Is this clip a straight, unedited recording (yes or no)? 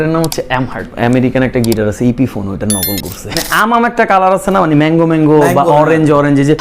no